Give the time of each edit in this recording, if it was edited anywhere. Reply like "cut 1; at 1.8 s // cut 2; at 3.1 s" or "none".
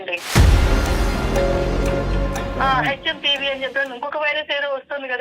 cut 1; at 2.6 s